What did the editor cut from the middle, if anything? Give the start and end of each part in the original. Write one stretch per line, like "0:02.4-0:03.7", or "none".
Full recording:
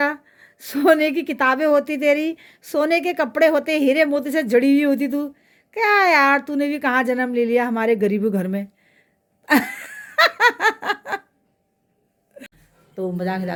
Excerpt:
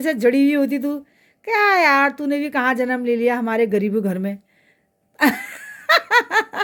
none